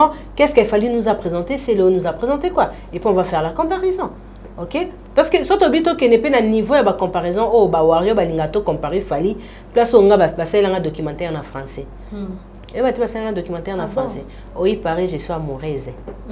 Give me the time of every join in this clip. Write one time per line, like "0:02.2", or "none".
none